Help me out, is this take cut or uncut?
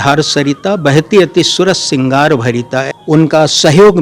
cut